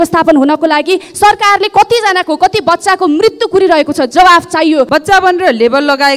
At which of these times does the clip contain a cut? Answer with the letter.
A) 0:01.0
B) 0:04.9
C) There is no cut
B